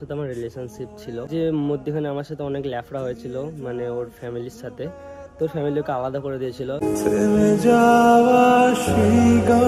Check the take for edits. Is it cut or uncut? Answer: cut